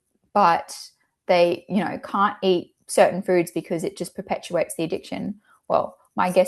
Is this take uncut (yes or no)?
yes